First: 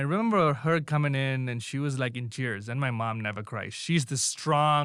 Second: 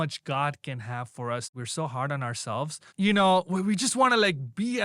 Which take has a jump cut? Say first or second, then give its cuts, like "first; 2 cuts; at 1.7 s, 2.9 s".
second; 2 cuts; at 1.5 s, 2.9 s